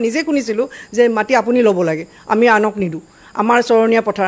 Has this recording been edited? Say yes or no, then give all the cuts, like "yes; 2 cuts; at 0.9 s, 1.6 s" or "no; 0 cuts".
no; 0 cuts